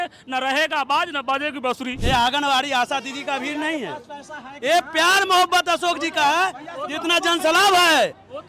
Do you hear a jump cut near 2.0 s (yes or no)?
yes